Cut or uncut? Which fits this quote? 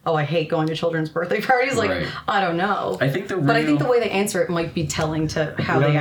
uncut